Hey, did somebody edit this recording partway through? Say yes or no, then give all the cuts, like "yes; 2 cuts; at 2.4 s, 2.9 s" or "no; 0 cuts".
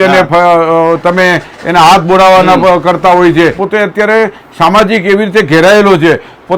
yes; 1 cut; at 3.6 s